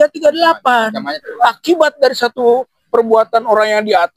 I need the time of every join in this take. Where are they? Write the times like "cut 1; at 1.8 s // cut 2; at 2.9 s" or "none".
cut 1; at 1.2 s